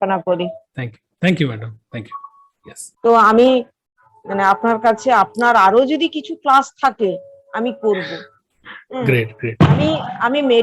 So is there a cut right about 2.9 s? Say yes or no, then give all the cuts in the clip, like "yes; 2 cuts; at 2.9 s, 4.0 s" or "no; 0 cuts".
yes; 1 cut; at 2.9 s